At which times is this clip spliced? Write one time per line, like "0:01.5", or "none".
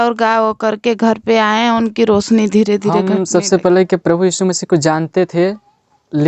0:03.0